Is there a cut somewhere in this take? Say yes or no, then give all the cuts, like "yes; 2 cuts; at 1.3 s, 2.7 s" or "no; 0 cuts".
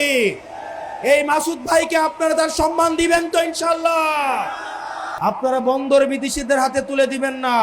yes; 1 cut; at 5.0 s